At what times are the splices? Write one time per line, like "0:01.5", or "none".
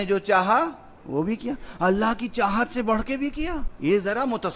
0:03.7

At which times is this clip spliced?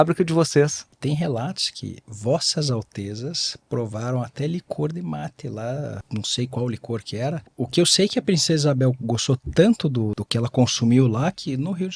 0:01.0
0:06.0
0:07.5
0:10.2

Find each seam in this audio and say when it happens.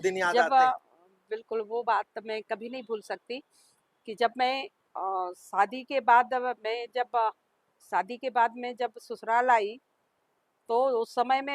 none

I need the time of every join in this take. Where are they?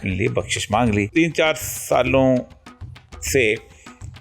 0:01.1

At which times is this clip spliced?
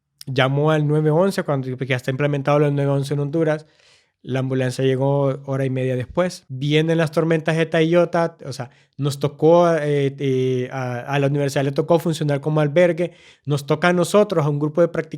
0:06.5

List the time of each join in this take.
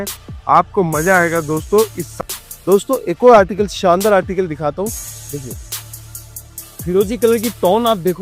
0:02.1

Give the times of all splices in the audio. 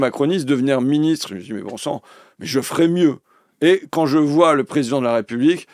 none

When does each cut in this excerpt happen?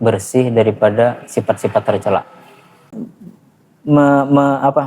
0:02.8

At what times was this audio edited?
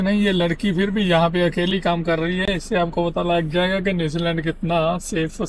none

